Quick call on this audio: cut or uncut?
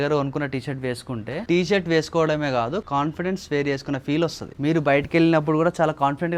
uncut